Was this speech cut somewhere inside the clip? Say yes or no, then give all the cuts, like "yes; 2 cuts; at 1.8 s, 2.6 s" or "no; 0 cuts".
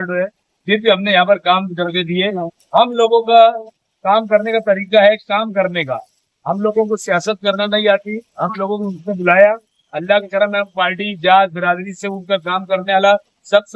no; 0 cuts